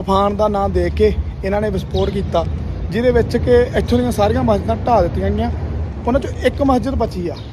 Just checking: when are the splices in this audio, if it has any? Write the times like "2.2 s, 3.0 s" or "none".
none